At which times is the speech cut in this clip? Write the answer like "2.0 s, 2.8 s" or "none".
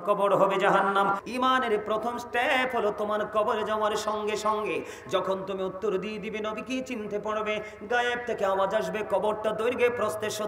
1.2 s